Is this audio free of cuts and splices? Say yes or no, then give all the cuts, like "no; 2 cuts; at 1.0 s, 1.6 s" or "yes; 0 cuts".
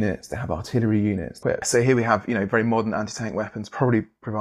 no; 1 cut; at 1.6 s